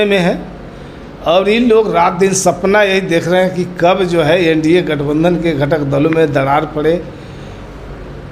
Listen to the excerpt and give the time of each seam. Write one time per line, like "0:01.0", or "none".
none